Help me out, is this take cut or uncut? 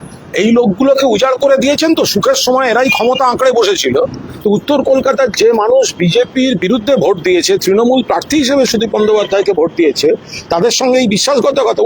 cut